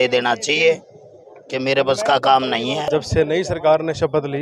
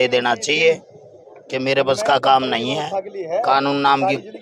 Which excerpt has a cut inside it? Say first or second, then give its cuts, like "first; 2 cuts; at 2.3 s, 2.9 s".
first; 1 cut; at 2.9 s